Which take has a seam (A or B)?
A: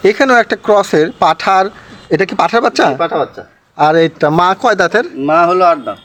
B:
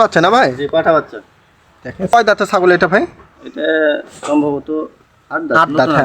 B